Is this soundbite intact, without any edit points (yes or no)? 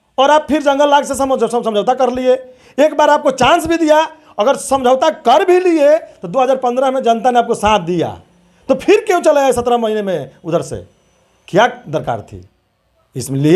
yes